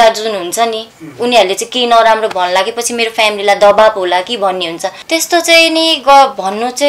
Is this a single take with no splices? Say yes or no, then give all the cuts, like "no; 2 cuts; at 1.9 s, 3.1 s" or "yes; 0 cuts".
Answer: no; 1 cut; at 4.9 s